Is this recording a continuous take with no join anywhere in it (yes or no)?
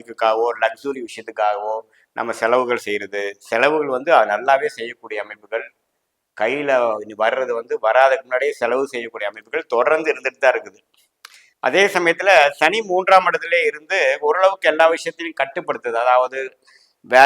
yes